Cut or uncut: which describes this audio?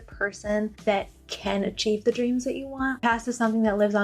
cut